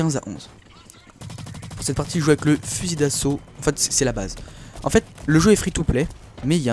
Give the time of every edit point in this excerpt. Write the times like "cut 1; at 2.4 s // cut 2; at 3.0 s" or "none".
cut 1; at 4.2 s